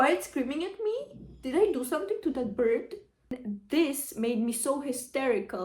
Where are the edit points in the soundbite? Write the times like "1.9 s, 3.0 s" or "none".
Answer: 3.1 s

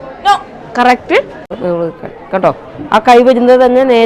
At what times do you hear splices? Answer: 1.5 s

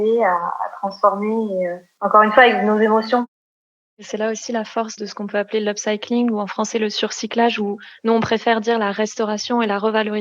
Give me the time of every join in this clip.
1.8 s, 3.9 s, 4.9 s

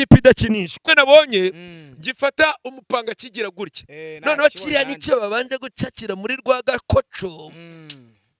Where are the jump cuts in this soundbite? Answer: 0.9 s

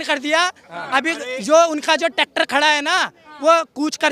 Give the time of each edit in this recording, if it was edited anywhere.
none

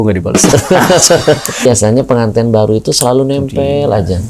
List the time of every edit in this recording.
1.7 s

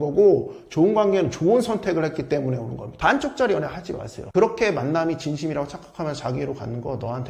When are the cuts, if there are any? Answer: 2.8 s, 4.2 s

